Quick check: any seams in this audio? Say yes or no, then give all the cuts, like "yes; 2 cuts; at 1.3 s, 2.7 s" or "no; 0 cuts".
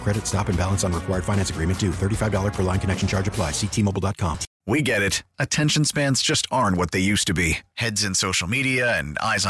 yes; 1 cut; at 4.5 s